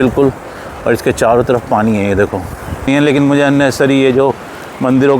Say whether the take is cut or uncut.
cut